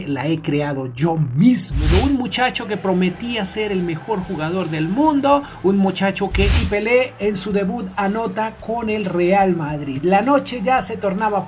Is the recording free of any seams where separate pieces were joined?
no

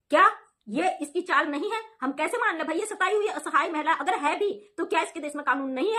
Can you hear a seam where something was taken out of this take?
no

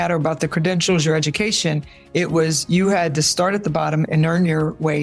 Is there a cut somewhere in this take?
yes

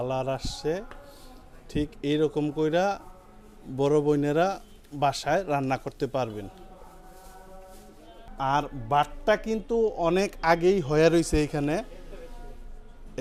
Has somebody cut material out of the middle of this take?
no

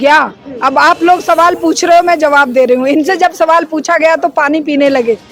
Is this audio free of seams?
yes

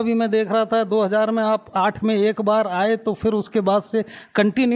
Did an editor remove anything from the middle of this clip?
no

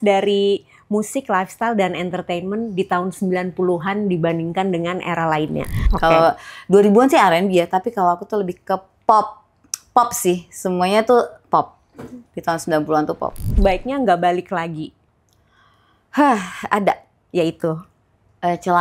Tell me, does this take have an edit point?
yes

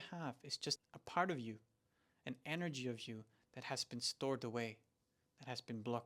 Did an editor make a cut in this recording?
yes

